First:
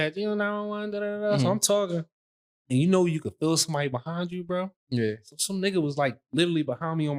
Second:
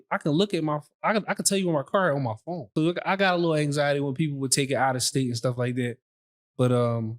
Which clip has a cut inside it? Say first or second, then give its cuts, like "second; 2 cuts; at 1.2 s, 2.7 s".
second; 1 cut; at 2.7 s